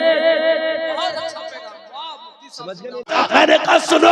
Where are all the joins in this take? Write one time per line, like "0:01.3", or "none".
0:03.1